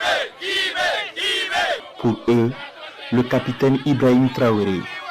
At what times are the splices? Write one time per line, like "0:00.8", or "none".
0:01.9